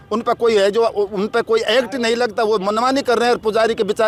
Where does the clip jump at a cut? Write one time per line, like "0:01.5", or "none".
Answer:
none

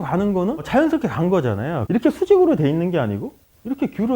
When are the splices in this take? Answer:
0:01.8

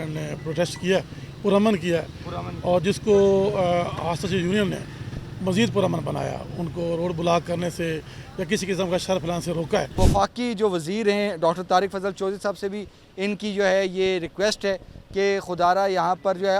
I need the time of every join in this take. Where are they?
0:10.0

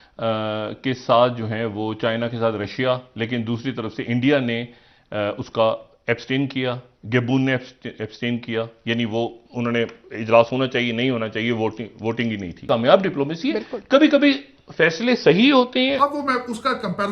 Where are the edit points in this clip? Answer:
0:12.5
0:16.0

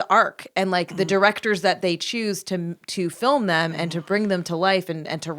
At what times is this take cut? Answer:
none

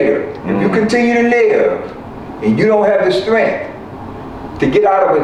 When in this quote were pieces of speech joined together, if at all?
none

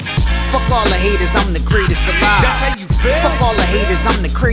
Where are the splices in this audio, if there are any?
none

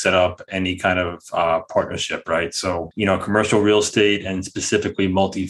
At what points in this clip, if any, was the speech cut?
0:02.9

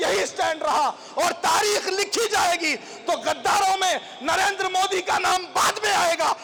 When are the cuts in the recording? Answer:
none

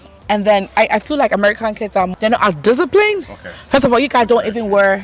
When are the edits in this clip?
none

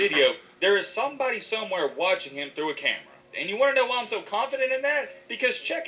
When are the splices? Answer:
0:03.4

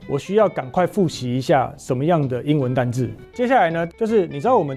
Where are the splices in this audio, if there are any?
0:03.7

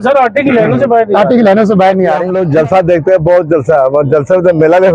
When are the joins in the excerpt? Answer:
0:02.3

